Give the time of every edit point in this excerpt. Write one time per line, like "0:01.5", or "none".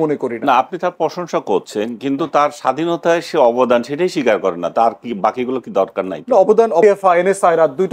0:06.8